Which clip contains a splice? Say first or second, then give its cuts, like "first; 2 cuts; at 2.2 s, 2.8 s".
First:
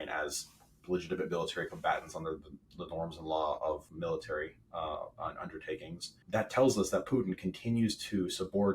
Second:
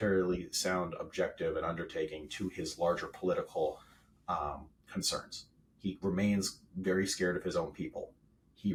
first; 2 cuts; at 3.9 s, 6.1 s